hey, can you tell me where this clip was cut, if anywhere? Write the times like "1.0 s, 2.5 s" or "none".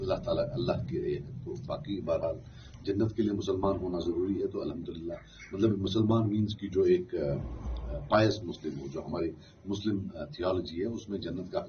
none

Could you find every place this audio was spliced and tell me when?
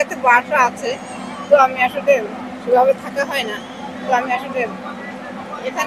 none

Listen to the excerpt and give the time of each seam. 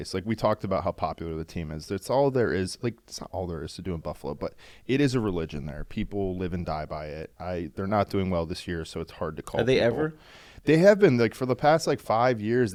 none

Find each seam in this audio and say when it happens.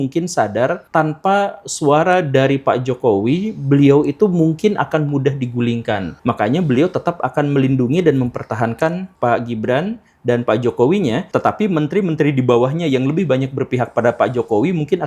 0.8 s, 6.1 s, 9.1 s, 11.2 s

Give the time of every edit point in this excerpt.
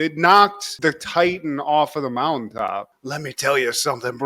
2.9 s

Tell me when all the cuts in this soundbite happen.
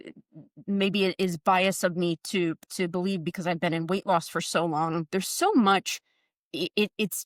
none

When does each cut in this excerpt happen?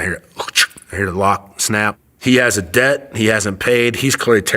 2.0 s

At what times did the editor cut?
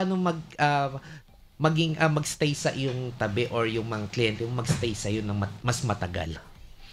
none

